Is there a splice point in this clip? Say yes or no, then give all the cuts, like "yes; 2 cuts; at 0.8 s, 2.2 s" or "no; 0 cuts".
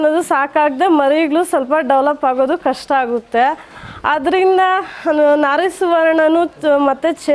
no; 0 cuts